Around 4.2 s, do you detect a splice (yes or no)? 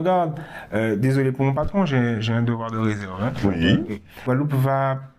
yes